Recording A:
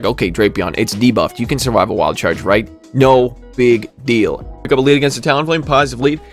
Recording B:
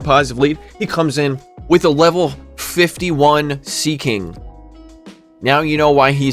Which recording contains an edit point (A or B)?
A